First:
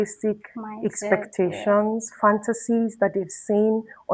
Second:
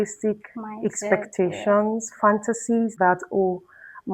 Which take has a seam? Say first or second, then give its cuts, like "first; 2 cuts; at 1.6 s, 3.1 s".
second; 1 cut; at 2.9 s